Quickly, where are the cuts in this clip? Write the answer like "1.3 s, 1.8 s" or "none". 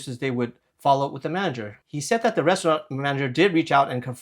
1.8 s